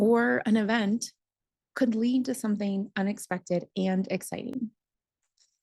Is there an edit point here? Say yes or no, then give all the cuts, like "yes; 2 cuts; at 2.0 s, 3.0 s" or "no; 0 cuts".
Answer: no; 0 cuts